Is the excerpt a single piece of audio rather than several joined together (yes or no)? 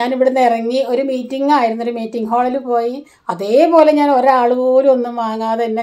yes